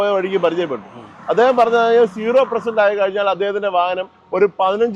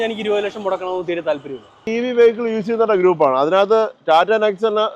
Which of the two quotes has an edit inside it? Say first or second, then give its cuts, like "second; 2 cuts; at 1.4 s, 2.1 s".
second; 1 cut; at 1.9 s